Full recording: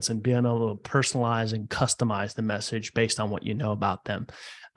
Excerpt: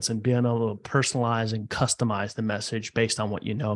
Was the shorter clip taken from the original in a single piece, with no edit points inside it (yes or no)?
yes